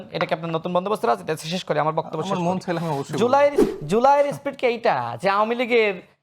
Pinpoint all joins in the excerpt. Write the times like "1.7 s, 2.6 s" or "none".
3.7 s